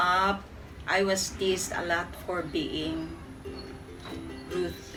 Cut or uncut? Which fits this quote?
uncut